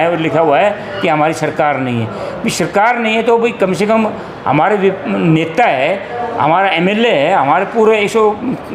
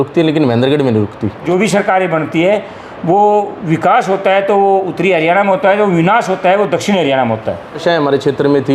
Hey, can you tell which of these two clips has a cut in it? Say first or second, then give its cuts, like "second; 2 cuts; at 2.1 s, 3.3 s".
second; 2 cuts; at 1.4 s, 7.8 s